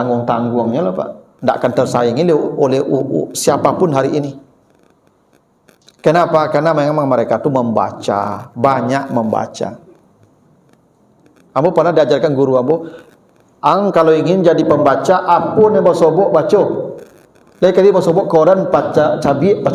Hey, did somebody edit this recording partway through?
no; 0 cuts

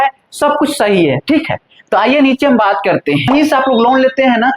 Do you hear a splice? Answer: yes; 1 cut; at 3.3 s

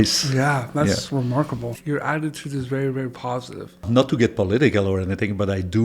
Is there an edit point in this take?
yes; 2 cuts; at 1.8 s, 3.9 s

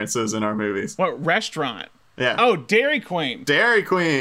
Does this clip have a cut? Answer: yes; 1 cut; at 0.9 s

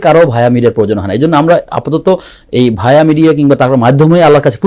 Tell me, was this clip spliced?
no; 0 cuts

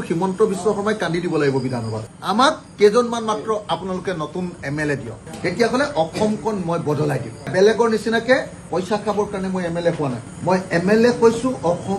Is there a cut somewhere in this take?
yes; 2 cuts; at 2.2 s, 5.2 s

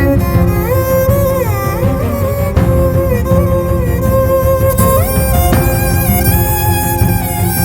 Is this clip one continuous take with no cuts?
yes; 0 cuts

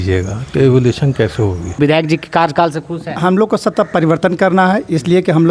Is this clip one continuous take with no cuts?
no; 1 cut; at 1.8 s

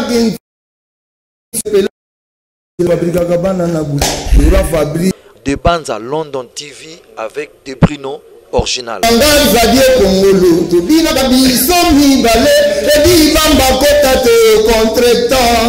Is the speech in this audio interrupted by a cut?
yes; 2 cuts; at 5.1 s, 9.0 s

